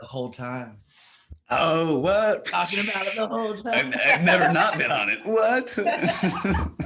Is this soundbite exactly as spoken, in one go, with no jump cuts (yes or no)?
yes